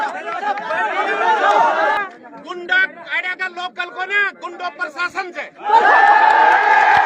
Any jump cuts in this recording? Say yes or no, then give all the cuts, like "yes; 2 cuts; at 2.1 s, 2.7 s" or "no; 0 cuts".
yes; 1 cut; at 2.0 s